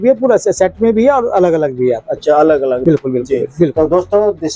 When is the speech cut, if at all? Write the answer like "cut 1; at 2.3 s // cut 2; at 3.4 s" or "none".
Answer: cut 1; at 2.8 s